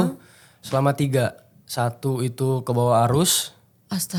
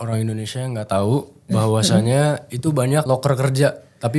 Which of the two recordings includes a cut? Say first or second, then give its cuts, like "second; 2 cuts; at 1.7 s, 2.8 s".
second; 1 cut; at 3.0 s